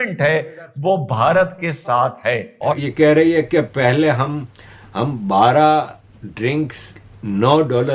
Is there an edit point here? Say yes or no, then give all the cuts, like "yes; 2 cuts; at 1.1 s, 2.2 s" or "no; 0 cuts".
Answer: yes; 2 cuts; at 2.8 s, 4.6 s